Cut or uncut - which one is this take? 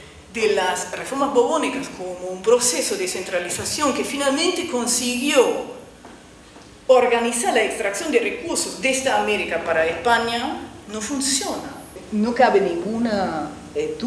cut